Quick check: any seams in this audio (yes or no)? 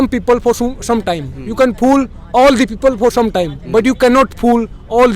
no